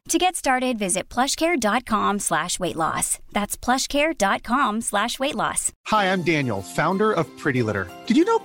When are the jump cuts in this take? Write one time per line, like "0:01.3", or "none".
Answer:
0:05.7

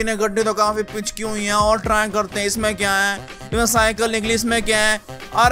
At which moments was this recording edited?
none

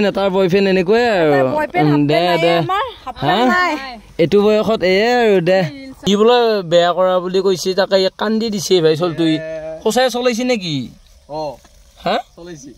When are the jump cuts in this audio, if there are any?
0:05.9

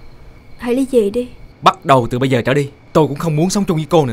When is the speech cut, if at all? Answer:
0:01.4
0:02.8

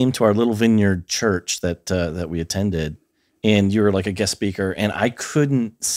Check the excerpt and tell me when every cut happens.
none

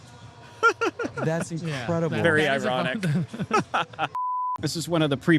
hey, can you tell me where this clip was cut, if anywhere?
0:04.2

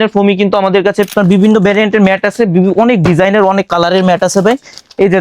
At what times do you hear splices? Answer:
0:01.1

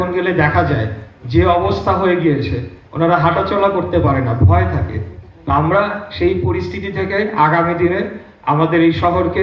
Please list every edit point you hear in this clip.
none

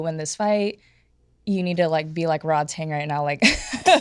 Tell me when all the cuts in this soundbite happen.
none

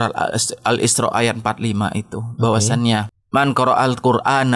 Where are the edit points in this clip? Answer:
0:03.2

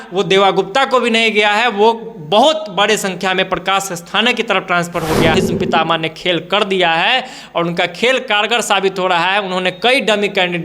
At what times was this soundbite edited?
0:05.3

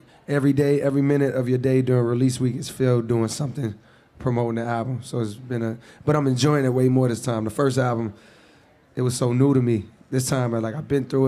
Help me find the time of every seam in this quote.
0:07.3

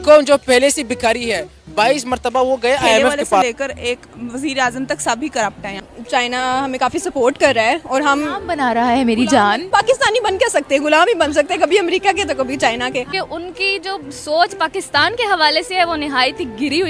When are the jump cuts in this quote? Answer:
0:03.4
0:05.8
0:09.6
0:13.1

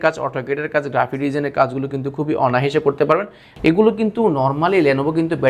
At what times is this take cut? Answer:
0:03.4

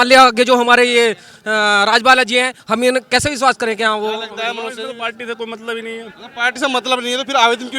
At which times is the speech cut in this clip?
0:04.7

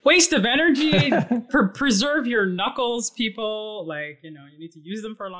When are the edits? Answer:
none

